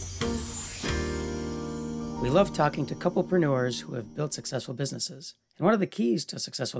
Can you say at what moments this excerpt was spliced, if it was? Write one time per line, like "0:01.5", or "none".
0:02.2